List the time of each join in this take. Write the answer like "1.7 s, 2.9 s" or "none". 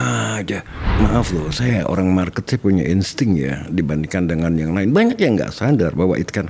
1.0 s